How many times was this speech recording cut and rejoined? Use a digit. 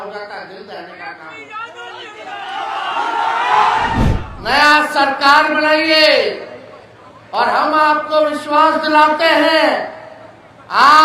1